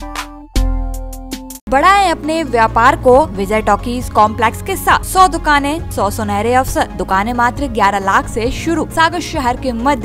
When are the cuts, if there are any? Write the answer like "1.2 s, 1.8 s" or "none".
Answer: 1.7 s, 3.4 s, 5.1 s, 5.9 s, 7.0 s, 8.9 s